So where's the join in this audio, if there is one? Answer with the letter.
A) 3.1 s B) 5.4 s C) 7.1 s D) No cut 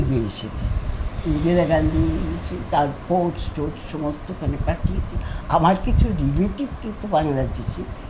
D